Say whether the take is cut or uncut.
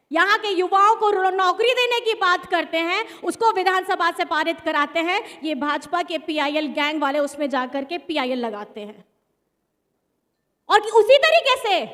uncut